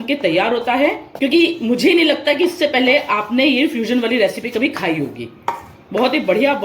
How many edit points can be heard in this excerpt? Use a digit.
1